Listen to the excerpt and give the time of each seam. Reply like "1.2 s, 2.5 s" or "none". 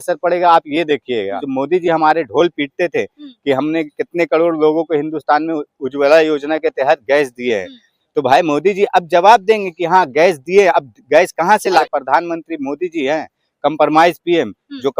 1.4 s, 11.8 s